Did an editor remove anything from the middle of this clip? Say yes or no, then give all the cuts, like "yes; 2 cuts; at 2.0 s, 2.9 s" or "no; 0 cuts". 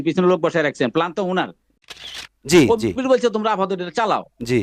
yes; 1 cut; at 1.9 s